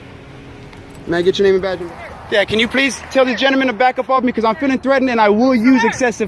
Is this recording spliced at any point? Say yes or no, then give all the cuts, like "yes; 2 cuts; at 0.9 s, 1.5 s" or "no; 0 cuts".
yes; 1 cut; at 1.8 s